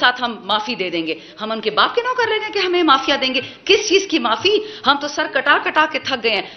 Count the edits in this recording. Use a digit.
0